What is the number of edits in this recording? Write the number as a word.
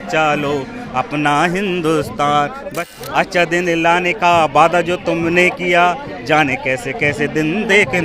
one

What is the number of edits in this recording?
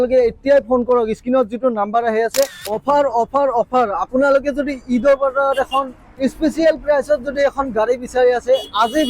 one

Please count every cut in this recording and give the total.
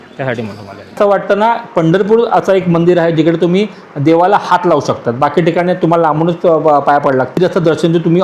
two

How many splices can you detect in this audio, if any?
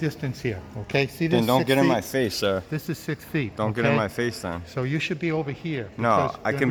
zero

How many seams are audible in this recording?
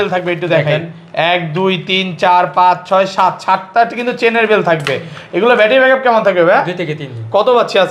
zero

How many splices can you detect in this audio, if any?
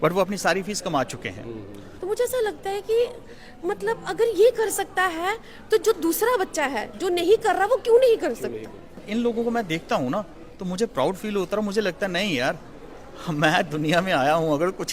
two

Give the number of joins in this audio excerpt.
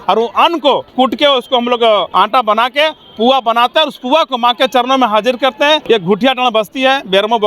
three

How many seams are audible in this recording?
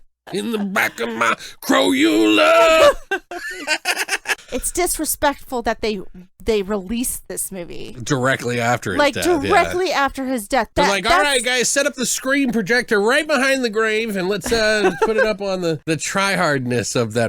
three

